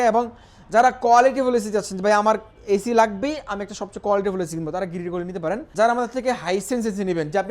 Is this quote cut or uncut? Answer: cut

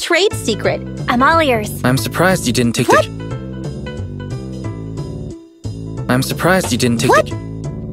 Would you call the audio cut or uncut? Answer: uncut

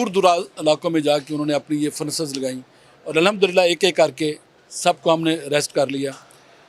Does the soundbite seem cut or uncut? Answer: uncut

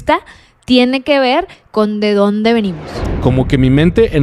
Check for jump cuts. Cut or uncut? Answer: cut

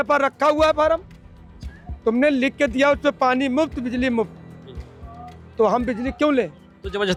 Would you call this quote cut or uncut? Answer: uncut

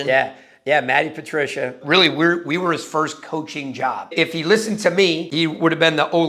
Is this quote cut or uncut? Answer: cut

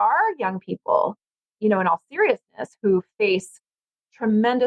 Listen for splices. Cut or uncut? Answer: uncut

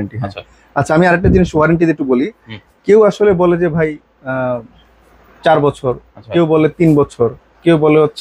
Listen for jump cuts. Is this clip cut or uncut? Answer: uncut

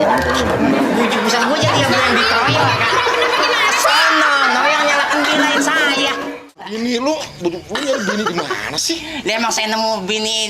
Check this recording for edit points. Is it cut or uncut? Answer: cut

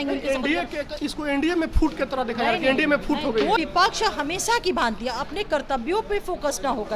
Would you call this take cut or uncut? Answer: cut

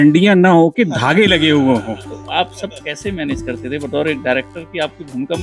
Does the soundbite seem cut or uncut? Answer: cut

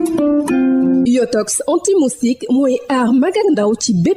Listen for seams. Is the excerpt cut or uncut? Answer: cut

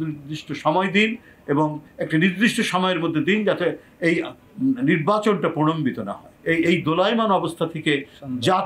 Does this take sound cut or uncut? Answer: cut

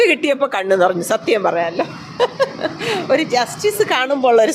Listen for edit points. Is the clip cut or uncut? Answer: uncut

